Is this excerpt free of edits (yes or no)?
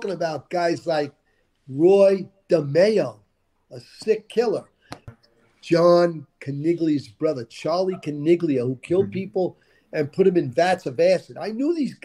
no